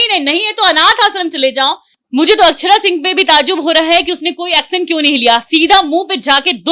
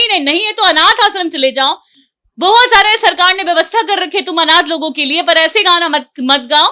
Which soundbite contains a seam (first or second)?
first